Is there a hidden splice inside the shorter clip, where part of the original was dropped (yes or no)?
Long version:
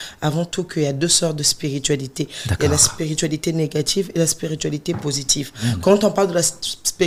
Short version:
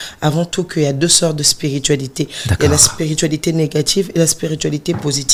no